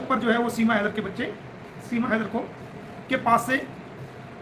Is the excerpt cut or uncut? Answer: uncut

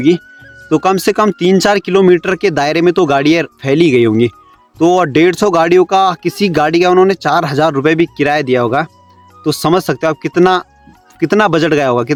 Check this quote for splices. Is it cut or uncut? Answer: uncut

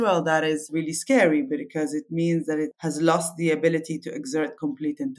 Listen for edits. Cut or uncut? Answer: uncut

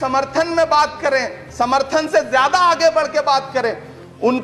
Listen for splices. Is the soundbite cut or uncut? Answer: uncut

